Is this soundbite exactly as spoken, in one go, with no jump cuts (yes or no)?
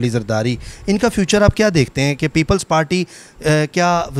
yes